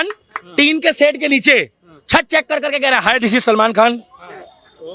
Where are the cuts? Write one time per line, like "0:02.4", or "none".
none